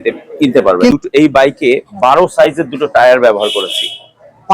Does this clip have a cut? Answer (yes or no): yes